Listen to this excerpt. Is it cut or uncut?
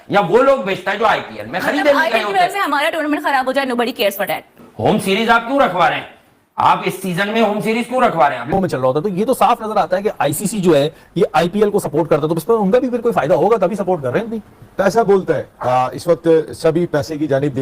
cut